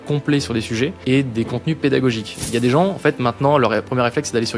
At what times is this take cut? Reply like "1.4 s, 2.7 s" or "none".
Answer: 1.0 s, 2.4 s